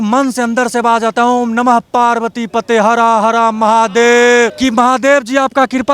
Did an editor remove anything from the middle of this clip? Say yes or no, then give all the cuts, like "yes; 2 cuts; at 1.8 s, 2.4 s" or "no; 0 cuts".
yes; 1 cut; at 4.5 s